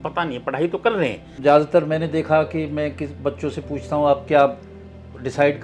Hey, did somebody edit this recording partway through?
yes; 1 cut; at 1.3 s

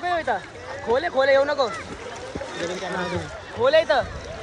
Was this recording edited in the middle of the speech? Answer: no; 0 cuts

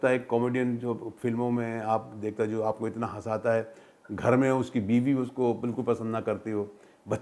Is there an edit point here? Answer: no; 0 cuts

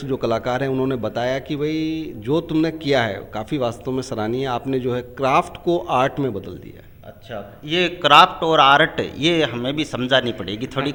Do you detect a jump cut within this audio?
no; 0 cuts

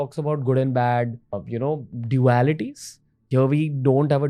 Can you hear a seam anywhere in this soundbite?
yes; 1 cut; at 1.4 s

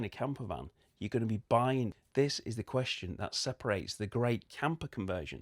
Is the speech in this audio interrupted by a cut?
yes; 1 cut; at 2.0 s

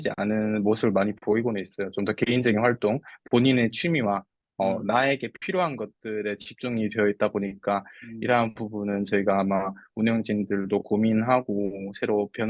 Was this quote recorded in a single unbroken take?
yes; 0 cuts

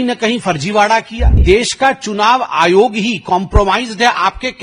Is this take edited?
yes; 1 cut; at 1.4 s

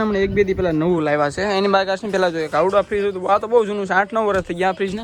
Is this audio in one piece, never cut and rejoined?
yes; 0 cuts

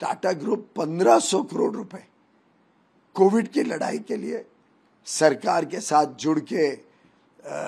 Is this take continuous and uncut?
yes; 0 cuts

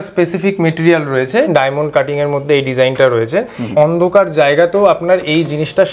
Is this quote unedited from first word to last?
no; 2 cuts; at 1.5 s, 3.7 s

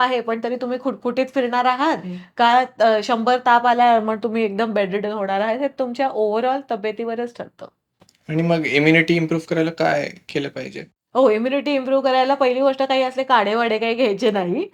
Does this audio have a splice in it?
no; 0 cuts

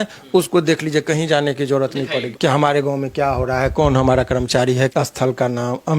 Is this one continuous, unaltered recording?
no; 2 cuts; at 2.3 s, 4.9 s

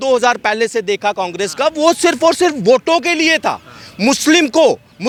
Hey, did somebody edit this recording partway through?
no; 0 cuts

